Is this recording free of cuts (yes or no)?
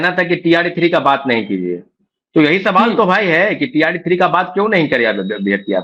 yes